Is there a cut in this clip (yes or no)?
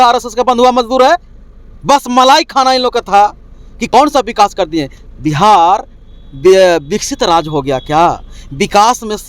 yes